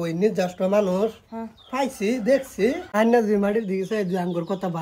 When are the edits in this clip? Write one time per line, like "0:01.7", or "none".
0:02.8